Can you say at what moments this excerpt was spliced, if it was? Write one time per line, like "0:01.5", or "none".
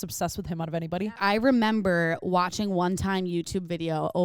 0:01.0